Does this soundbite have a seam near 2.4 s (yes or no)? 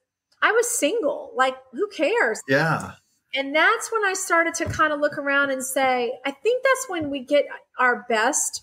yes